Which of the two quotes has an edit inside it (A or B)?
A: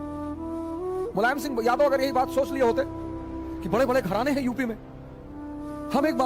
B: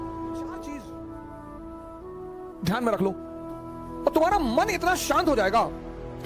B